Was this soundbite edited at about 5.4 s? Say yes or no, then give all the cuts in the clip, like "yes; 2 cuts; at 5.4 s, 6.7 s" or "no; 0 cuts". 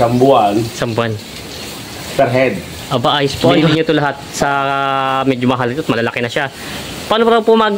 no; 1 cut; at 3.7 s